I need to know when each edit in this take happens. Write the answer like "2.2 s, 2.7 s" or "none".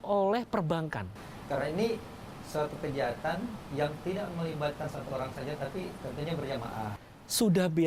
1.1 s, 6.9 s